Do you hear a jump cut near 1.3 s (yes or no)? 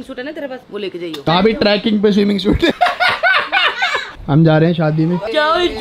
yes